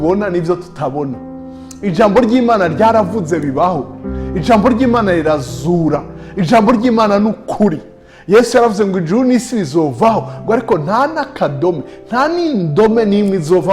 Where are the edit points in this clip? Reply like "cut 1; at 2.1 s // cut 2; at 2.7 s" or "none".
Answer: none